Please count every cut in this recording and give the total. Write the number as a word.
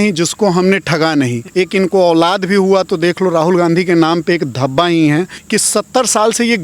two